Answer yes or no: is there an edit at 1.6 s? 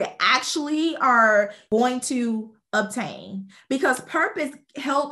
yes